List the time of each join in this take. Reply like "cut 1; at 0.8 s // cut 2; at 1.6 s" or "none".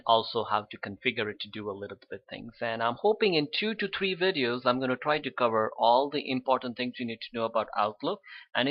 none